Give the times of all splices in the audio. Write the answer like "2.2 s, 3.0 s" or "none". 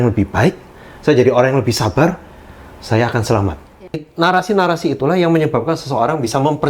4.0 s